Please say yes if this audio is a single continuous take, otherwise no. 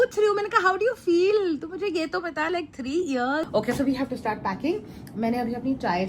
no